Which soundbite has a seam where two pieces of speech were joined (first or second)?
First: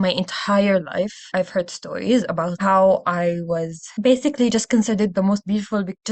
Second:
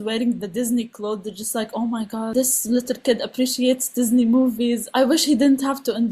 second